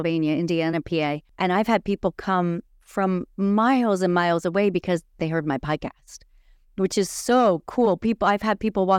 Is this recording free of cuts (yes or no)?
no